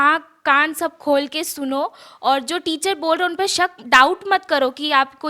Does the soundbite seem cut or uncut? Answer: uncut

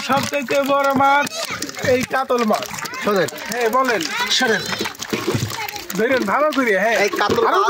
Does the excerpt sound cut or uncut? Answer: uncut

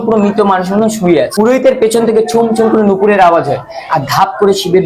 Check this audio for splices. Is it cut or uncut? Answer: cut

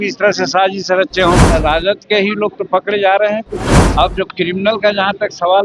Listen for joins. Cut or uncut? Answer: cut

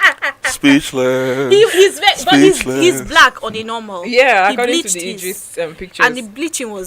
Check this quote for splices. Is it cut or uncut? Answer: uncut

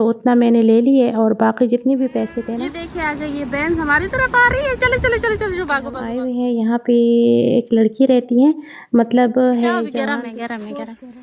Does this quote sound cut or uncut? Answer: cut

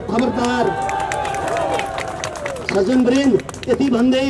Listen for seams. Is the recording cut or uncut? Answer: uncut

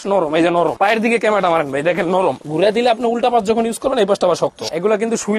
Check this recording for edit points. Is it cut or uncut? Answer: cut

